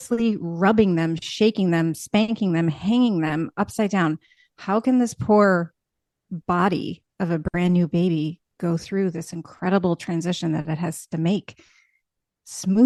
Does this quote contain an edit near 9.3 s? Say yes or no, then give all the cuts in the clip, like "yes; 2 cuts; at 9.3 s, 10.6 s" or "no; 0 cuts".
no; 0 cuts